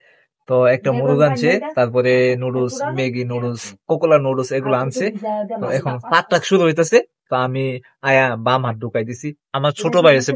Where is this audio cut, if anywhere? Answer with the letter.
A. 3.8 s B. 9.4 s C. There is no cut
B